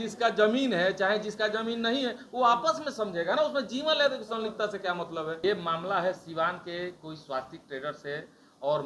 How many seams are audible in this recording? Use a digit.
1